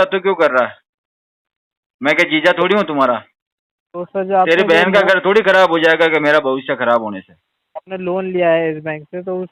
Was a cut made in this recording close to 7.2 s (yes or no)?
no